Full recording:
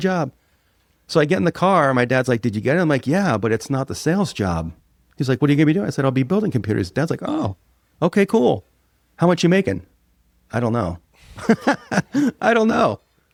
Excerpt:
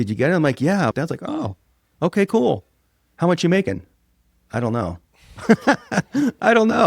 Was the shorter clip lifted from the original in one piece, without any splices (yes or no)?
no